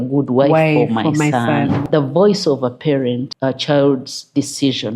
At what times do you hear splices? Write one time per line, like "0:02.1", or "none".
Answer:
0:01.8
0:03.3